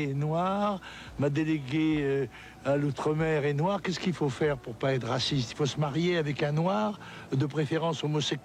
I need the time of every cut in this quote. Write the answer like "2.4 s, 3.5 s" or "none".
none